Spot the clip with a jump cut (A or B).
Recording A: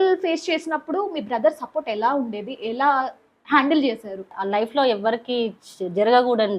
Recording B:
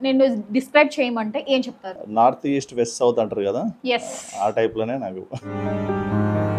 A